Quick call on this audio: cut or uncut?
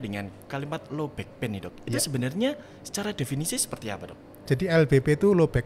cut